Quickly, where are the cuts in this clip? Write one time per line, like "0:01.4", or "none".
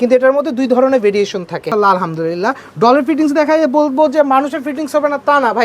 0:01.7